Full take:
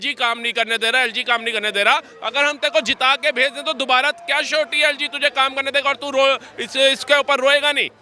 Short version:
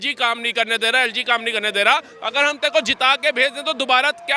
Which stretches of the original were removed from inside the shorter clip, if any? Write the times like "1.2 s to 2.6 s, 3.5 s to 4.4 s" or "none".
none